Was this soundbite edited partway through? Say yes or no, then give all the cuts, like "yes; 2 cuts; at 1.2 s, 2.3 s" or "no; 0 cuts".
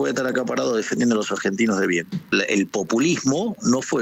yes; 1 cut; at 2.3 s